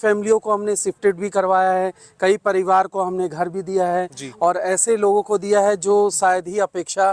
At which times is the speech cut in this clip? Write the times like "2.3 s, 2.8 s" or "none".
none

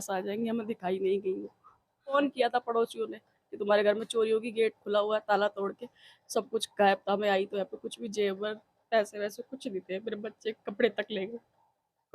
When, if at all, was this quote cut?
2.1 s

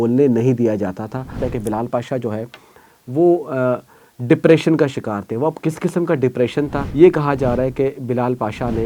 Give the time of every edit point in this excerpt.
1.3 s, 6.8 s

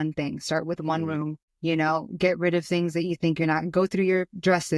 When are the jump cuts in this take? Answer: 1.5 s

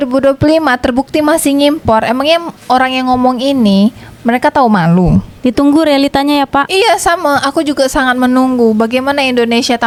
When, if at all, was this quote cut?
none

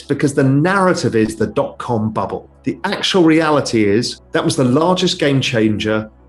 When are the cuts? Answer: 2.5 s, 4.2 s

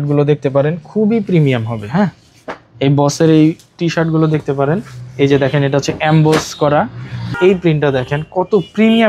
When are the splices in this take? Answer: 7.3 s

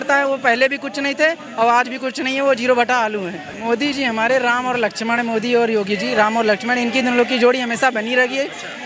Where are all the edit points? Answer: none

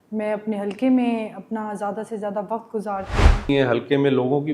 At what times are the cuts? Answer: 3.5 s

